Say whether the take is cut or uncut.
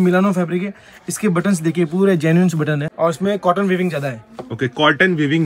cut